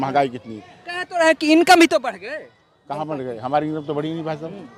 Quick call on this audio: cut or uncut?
uncut